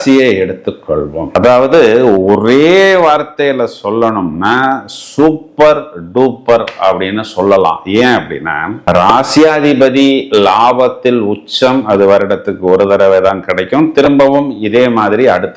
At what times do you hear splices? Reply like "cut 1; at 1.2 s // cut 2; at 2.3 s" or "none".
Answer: none